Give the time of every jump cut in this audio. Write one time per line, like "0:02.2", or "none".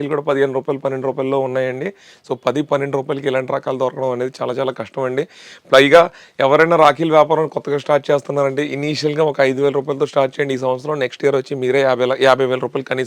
none